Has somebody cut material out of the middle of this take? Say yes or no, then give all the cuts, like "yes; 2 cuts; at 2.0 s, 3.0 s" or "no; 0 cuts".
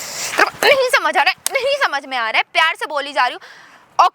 no; 0 cuts